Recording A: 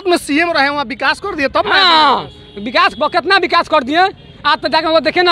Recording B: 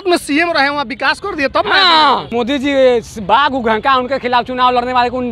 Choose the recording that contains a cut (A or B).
B